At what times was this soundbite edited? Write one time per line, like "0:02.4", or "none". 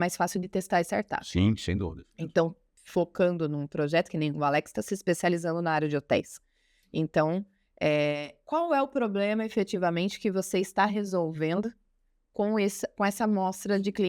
none

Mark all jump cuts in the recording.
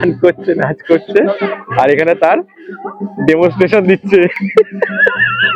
0:04.4

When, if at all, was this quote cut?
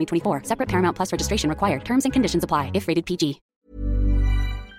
0:03.4

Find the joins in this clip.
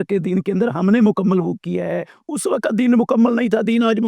none

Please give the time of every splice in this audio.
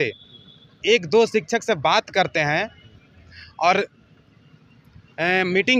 none

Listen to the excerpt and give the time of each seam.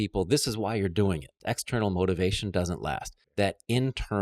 0:01.3
0:03.1

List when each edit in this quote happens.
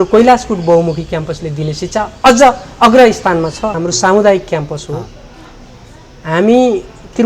0:03.8

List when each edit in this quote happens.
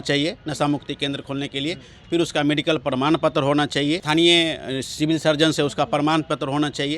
0:04.0

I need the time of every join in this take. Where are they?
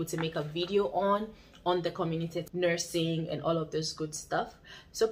0:02.5

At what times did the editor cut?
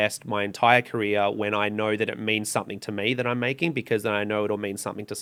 none

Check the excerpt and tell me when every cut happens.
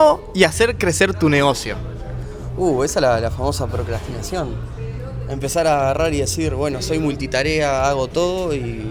none

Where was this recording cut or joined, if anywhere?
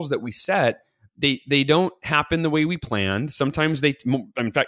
none

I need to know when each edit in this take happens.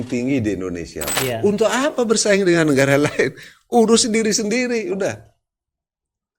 0:01.1

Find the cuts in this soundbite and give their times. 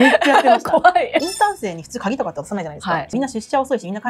0:01.2
0:03.1

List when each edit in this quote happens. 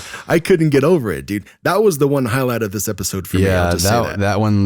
none

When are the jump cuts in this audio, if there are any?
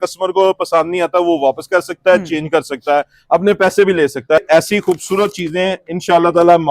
0:04.4

